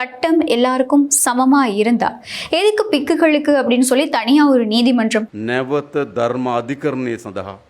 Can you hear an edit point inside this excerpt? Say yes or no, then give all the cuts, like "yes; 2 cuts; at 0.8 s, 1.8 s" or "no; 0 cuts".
yes; 1 cut; at 5.4 s